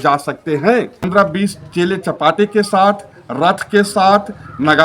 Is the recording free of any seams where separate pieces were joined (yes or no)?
no